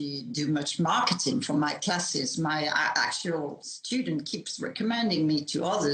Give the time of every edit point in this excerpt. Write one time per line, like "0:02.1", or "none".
none